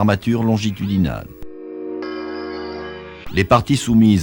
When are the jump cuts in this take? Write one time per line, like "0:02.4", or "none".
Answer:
none